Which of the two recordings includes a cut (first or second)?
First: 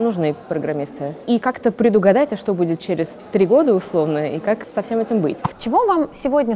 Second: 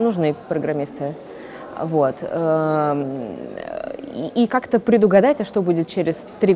first